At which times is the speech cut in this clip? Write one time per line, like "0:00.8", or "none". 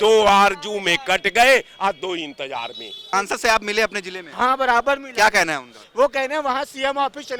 0:03.1